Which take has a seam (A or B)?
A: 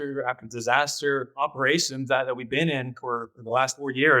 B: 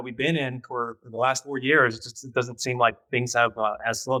A